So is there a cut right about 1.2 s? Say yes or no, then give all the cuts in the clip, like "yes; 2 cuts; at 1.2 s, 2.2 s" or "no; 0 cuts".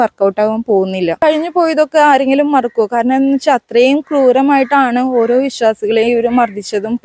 yes; 1 cut; at 1.2 s